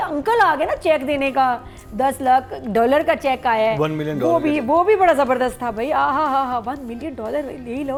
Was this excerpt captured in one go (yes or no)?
yes